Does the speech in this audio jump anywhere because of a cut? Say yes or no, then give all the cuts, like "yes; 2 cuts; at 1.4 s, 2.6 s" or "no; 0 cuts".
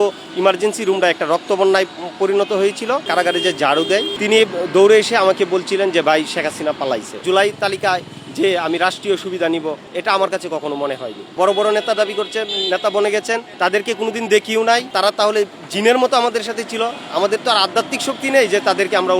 yes; 5 cuts; at 3.0 s, 4.1 s, 7.2 s, 11.2 s, 14.9 s